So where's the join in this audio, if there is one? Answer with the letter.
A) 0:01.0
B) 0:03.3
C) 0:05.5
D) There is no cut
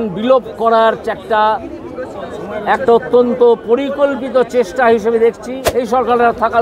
C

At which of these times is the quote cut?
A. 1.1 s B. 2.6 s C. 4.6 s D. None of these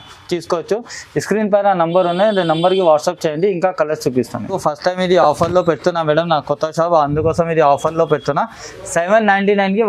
C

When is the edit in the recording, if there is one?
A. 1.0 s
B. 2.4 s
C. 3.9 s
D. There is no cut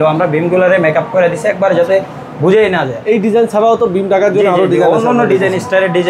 D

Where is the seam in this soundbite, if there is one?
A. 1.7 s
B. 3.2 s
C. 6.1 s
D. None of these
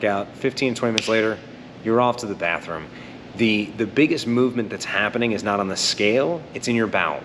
D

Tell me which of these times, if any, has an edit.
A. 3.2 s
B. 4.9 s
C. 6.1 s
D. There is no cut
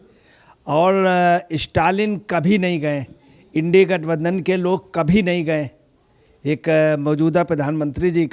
D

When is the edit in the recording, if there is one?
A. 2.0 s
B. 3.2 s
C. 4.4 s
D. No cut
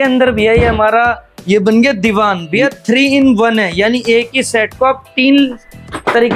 D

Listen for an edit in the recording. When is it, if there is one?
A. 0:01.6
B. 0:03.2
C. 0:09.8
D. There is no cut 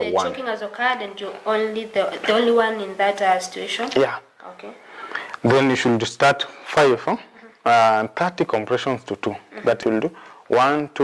C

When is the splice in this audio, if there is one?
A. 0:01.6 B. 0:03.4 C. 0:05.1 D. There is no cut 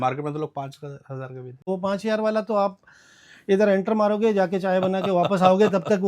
A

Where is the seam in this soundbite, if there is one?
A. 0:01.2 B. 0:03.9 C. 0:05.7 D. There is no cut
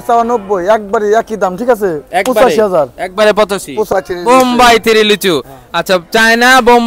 B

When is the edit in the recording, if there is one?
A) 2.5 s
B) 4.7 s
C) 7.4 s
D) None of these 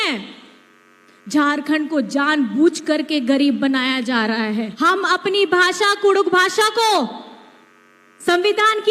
B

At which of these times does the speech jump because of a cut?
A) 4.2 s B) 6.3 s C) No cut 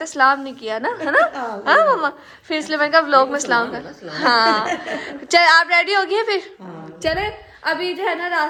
C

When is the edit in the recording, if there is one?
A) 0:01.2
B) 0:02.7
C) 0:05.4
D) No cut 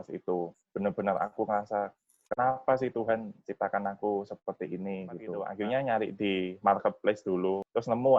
C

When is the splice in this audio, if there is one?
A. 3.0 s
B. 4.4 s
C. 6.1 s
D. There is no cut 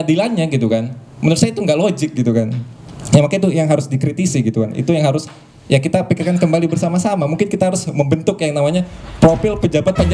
D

